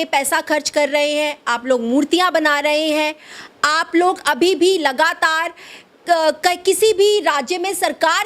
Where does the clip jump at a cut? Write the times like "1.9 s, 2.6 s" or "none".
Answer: none